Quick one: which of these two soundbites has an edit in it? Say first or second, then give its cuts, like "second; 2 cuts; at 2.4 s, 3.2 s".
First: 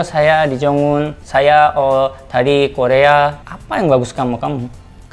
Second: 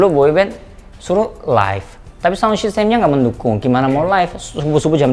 first; 2 cuts; at 1.2 s, 3.5 s